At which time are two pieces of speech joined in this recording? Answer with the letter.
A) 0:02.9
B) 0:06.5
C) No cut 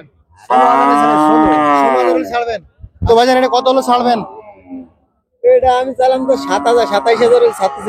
A